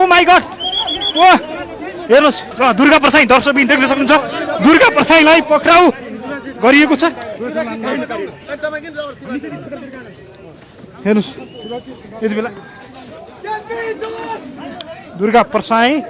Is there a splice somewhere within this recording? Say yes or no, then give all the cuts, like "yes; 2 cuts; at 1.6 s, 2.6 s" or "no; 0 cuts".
yes; 1 cut; at 2.4 s